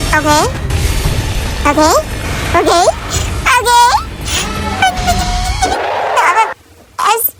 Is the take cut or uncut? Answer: uncut